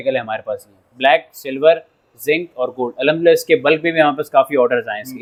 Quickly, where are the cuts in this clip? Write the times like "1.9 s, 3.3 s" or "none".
none